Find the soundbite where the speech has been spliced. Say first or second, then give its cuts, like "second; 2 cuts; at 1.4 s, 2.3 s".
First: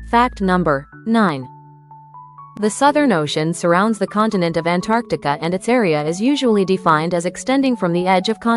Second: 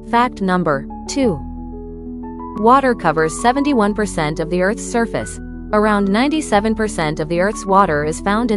second; 1 cut; at 1.0 s